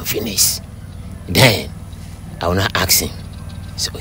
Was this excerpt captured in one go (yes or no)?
yes